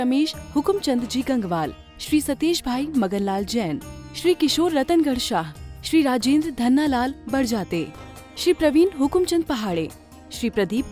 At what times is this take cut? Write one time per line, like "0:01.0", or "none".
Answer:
none